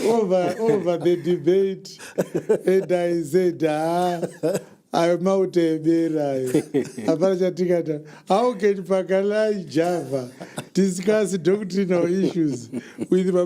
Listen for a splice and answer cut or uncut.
uncut